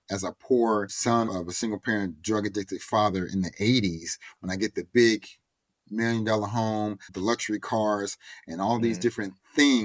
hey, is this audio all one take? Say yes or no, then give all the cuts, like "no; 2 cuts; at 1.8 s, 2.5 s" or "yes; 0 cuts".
no; 2 cuts; at 1.2 s, 7.1 s